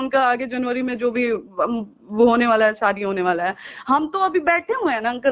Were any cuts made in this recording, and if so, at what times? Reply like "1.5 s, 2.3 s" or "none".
none